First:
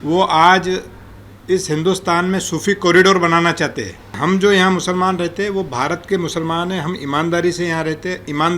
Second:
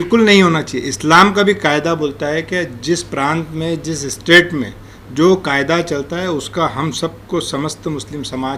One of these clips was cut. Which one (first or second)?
first